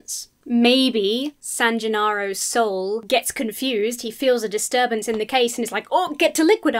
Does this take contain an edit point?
yes; 2 cuts; at 1.4 s, 3.0 s

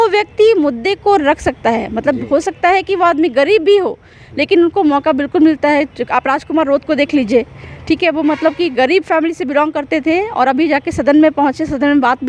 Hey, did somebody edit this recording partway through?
no; 0 cuts

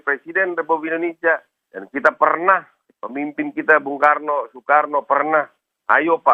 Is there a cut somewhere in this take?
no; 0 cuts

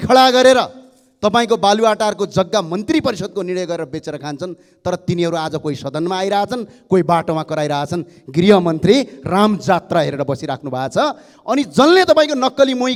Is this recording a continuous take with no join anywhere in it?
yes; 0 cuts

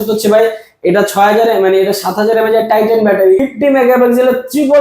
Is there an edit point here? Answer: yes; 1 cut; at 3.5 s

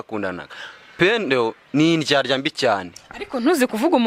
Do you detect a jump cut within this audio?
no; 0 cuts

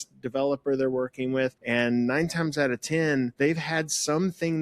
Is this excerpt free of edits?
no; 2 cuts; at 1.6 s, 3.3 s

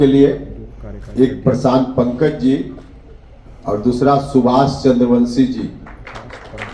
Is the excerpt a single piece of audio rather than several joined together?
yes; 0 cuts

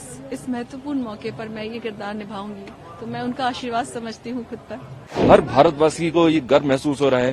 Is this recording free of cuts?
no; 1 cut; at 5.2 s

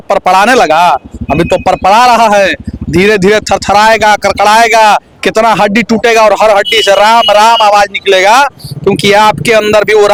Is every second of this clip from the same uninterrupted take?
yes; 0 cuts

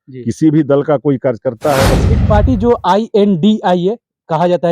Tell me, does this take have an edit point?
yes; 1 cut; at 2.0 s

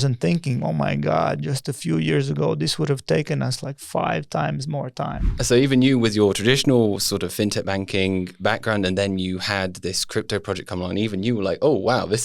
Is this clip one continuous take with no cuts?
no; 1 cut; at 5.3 s

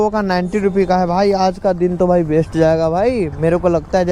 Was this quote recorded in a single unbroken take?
yes; 0 cuts

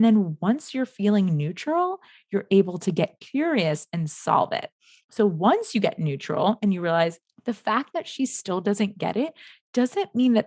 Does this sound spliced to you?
yes; 1 cut; at 7.3 s

